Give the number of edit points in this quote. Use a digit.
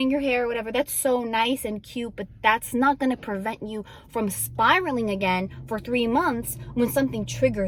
0